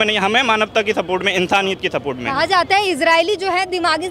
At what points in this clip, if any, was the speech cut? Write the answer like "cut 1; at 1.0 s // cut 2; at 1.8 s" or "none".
none